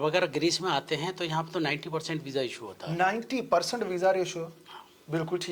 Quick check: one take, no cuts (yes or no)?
yes